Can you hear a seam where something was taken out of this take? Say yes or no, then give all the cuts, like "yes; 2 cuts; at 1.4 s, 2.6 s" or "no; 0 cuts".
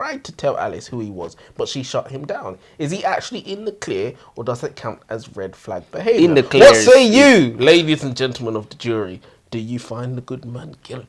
no; 0 cuts